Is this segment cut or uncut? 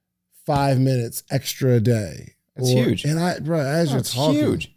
uncut